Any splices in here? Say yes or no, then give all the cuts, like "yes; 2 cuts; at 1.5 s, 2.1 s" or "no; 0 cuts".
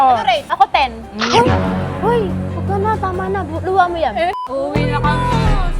yes; 1 cut; at 4.3 s